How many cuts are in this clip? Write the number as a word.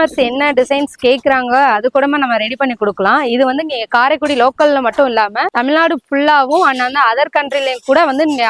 zero